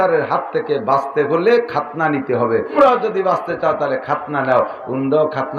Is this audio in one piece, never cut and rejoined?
no; 1 cut; at 2.7 s

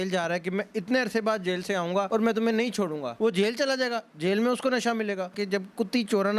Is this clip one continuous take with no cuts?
no; 3 cuts; at 2.1 s, 3.1 s, 5.4 s

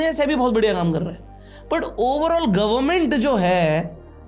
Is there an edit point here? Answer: no; 0 cuts

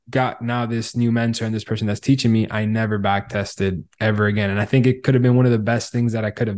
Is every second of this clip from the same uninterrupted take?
yes; 0 cuts

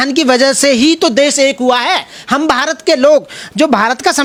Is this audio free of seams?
yes; 0 cuts

